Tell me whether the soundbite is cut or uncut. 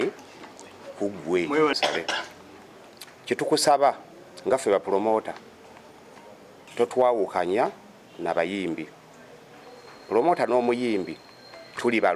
cut